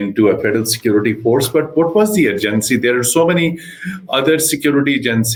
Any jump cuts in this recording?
no; 0 cuts

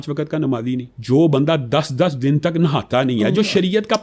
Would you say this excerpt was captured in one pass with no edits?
no; 1 cut; at 0.9 s

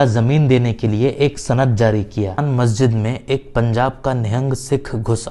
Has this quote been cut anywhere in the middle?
yes; 1 cut; at 2.4 s

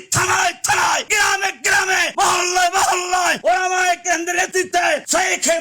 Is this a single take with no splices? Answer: no; 4 cuts; at 1.1 s, 2.1 s, 3.4 s, 4.8 s

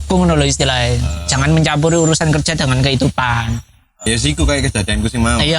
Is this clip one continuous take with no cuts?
no; 1 cut; at 4.1 s

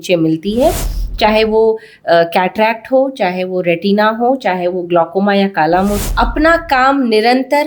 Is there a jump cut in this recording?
yes; 1 cut; at 6.0 s

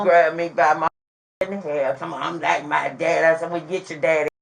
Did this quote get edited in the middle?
no; 0 cuts

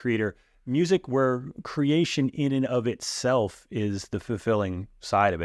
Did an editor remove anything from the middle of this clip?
no; 0 cuts

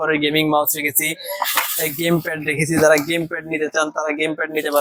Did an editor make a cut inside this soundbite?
no; 0 cuts

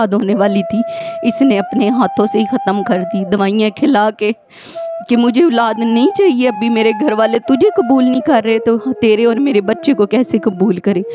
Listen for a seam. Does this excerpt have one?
no; 0 cuts

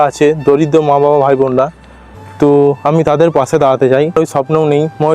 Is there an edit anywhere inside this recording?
yes; 1 cut; at 4.2 s

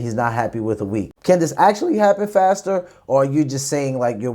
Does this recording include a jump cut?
yes; 1 cut; at 1.1 s

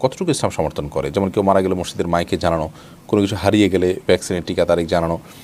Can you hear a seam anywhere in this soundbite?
no; 0 cuts

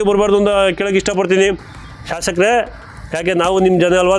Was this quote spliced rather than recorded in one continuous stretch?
yes; 1 cut; at 1.7 s

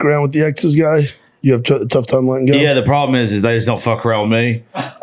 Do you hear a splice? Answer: no; 0 cuts

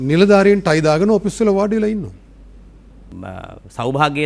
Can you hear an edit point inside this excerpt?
yes; 1 cut; at 3.1 s

